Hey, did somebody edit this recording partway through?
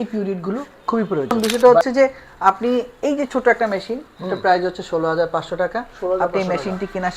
yes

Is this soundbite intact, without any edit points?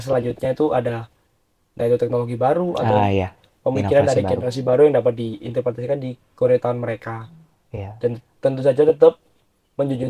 yes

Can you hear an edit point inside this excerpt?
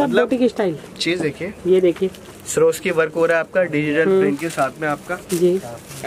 no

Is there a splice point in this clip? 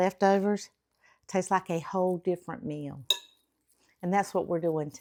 no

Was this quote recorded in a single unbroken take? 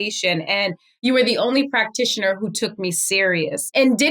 no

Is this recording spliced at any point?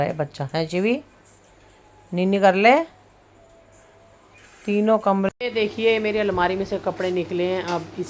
yes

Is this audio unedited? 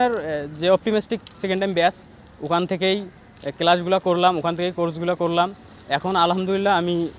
yes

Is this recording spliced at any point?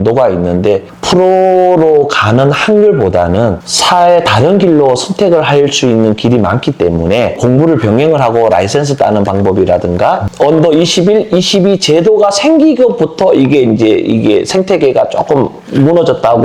yes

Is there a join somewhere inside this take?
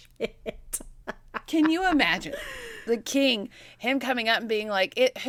no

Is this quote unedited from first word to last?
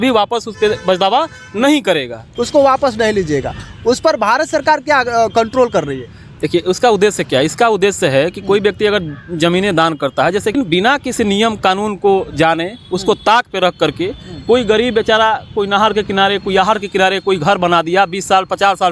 no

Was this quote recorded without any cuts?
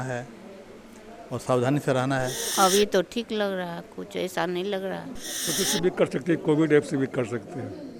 no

